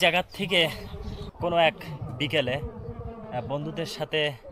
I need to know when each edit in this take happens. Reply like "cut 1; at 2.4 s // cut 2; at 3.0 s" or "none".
cut 1; at 1.3 s

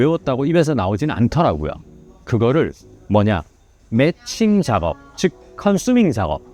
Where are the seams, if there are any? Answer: none

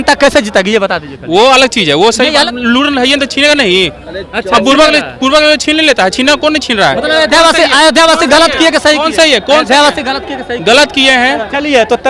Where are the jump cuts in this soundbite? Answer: none

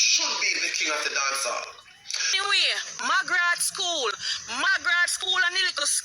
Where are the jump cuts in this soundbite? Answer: cut 1; at 2.3 s

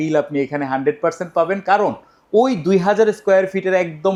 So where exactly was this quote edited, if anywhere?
none

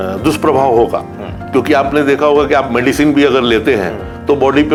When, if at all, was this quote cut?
none

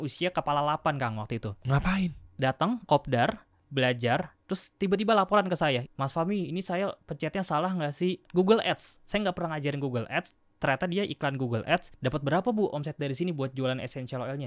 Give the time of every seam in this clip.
cut 1; at 3.5 s // cut 2; at 5.8 s // cut 3; at 8.3 s // cut 4; at 11.9 s

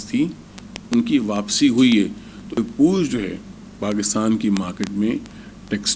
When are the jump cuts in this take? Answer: cut 1; at 2.6 s

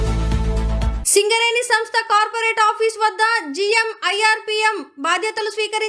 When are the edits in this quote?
cut 1; at 0.9 s

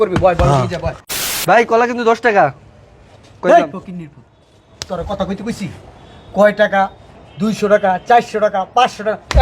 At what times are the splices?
cut 1; at 1.0 s

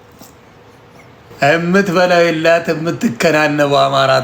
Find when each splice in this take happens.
cut 1; at 1.3 s

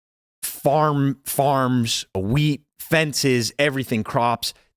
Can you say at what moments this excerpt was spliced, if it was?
cut 1; at 2.1 s

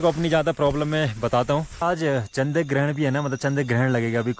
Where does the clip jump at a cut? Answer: cut 1; at 1.8 s

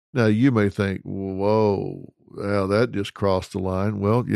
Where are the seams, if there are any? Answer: none

